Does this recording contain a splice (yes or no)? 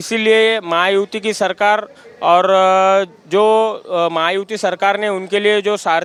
no